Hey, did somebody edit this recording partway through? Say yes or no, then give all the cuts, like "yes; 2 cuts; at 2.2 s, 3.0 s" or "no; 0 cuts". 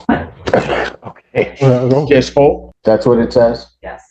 yes; 1 cut; at 2.7 s